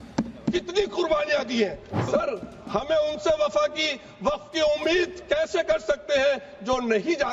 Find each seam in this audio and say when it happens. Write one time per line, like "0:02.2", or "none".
0:02.0